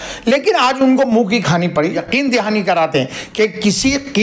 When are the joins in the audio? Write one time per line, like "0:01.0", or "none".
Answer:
0:01.9